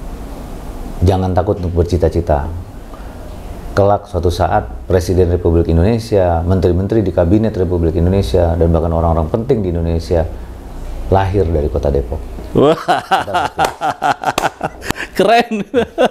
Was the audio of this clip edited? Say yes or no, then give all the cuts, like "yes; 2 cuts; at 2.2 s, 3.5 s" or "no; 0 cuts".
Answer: yes; 1 cut; at 14.9 s